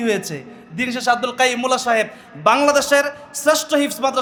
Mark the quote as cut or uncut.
uncut